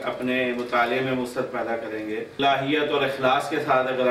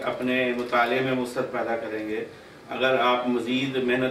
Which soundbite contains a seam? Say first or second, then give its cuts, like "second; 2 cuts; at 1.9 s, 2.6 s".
first; 1 cut; at 2.4 s